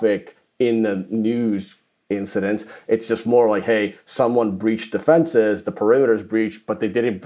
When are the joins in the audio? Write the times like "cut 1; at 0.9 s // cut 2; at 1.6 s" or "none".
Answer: none